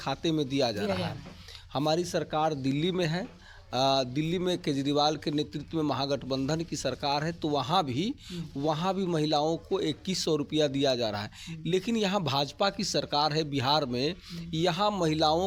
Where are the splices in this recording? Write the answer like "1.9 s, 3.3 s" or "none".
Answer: none